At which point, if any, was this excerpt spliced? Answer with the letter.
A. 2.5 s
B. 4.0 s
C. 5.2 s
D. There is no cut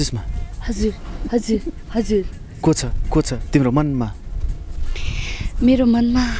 D